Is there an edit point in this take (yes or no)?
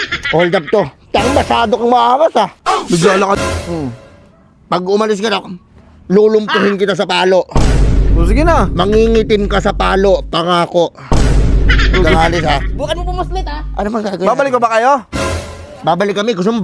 yes